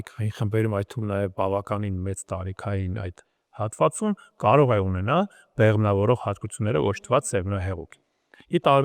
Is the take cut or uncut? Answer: uncut